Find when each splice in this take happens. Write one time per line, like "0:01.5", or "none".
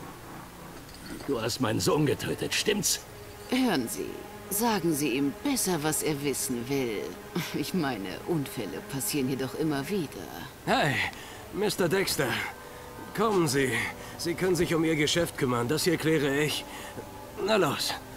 0:11.2